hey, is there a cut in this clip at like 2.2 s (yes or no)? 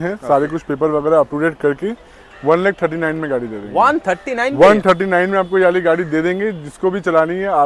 no